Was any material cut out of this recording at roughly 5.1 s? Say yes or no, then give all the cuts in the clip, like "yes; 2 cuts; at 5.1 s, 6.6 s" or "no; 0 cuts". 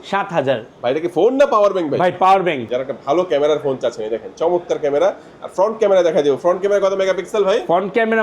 no; 1 cut; at 2.7 s